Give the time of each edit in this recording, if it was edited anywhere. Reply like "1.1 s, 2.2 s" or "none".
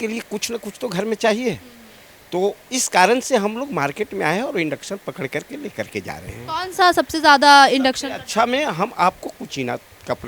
none